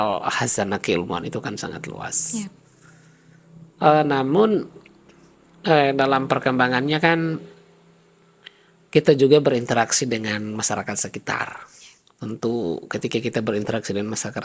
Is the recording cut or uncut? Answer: uncut